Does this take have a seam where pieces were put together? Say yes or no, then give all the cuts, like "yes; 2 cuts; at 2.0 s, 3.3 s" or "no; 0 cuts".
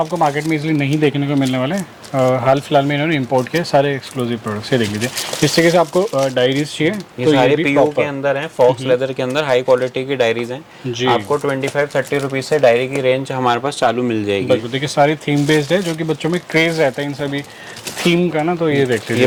no; 0 cuts